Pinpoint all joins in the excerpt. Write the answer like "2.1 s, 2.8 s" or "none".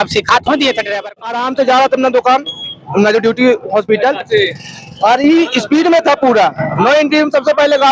1.2 s